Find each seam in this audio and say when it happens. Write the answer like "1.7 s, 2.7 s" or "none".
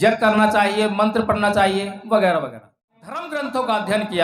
3.3 s